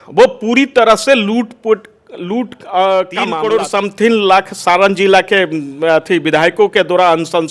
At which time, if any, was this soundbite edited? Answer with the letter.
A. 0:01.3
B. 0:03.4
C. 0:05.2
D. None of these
B